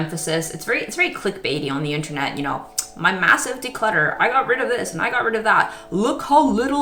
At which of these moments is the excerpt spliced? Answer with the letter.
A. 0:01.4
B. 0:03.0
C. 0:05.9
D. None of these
D